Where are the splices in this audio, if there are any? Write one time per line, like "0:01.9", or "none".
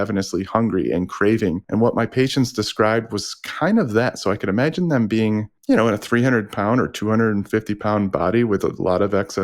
0:01.6
0:05.5